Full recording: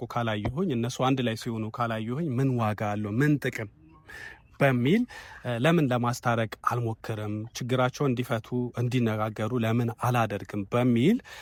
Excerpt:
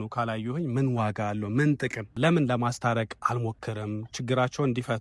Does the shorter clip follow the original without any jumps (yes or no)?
no